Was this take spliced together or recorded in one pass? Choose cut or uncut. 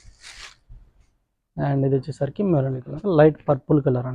cut